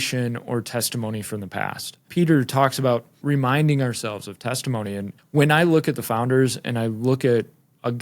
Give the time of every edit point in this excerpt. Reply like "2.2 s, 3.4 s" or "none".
2.0 s, 3.2 s, 5.1 s